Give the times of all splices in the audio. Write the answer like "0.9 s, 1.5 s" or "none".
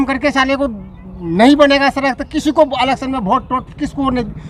none